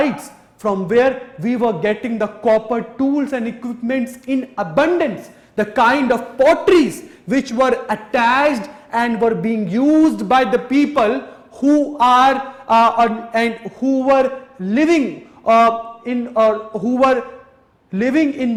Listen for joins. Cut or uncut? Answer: uncut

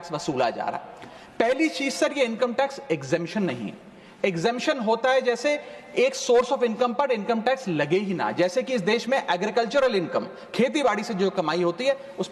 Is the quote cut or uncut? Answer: uncut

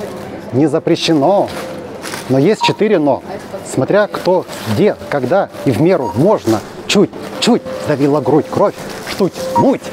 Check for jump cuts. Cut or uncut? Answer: uncut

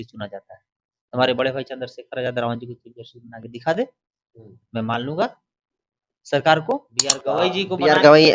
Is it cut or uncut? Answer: cut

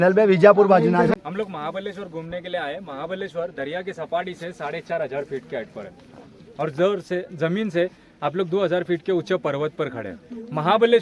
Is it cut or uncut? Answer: cut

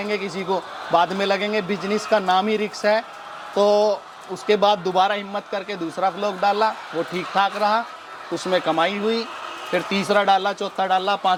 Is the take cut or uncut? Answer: uncut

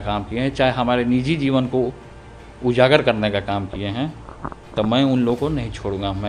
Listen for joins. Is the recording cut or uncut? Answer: uncut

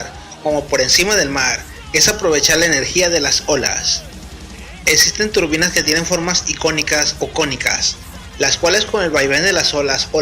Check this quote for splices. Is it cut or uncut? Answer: cut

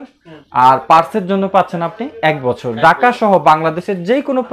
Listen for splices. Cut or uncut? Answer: uncut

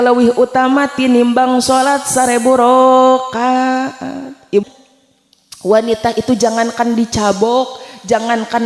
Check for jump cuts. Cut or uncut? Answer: cut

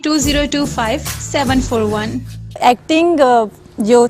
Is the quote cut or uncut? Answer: cut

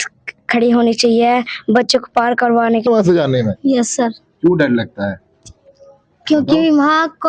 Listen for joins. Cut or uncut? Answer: cut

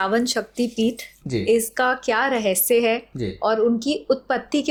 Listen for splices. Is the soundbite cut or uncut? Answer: uncut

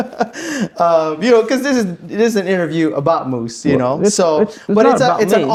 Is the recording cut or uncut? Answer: uncut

